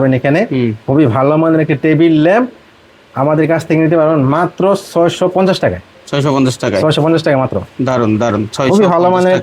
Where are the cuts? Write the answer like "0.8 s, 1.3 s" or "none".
none